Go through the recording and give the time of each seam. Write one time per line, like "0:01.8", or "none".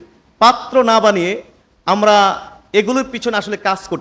none